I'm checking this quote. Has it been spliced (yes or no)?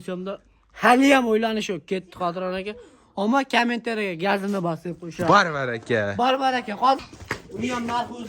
yes